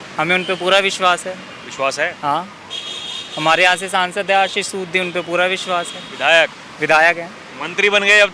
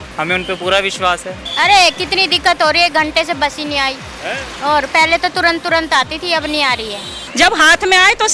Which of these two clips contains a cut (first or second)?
second